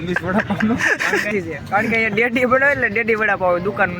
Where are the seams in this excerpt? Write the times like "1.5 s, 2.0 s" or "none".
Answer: 1.3 s